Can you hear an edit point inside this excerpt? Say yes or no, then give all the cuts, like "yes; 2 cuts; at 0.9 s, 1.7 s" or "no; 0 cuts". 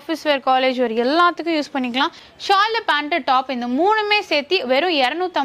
yes; 1 cut; at 2.3 s